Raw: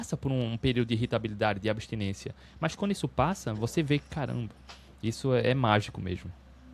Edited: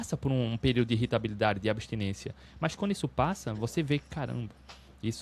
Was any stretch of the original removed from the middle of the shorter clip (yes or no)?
no